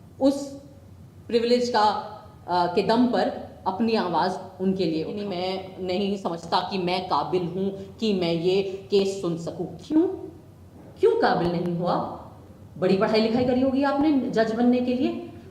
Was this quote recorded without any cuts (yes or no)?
no